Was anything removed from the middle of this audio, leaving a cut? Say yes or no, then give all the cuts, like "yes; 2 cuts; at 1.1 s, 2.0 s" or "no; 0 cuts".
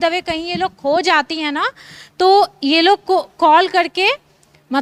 no; 0 cuts